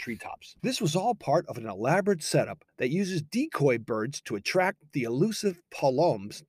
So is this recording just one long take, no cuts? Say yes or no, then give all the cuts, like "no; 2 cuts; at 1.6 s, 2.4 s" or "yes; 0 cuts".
no; 1 cut; at 2.6 s